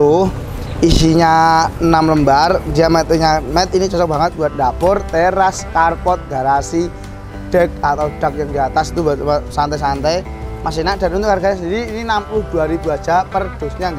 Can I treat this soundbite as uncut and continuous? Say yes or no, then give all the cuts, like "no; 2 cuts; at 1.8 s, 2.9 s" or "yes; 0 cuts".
yes; 0 cuts